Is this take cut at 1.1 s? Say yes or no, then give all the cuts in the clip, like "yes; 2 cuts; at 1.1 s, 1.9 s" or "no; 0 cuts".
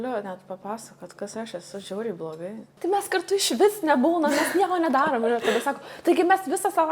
no; 1 cut; at 2.7 s